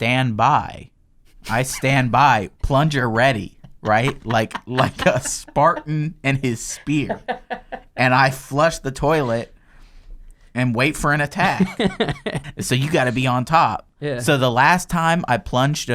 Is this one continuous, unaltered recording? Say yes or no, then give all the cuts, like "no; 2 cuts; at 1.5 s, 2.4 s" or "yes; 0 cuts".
no; 1 cut; at 12.4 s